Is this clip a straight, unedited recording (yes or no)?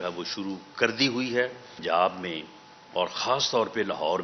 no